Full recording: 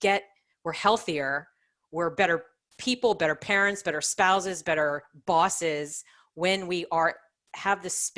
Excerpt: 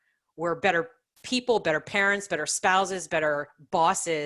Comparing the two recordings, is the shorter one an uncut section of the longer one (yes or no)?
yes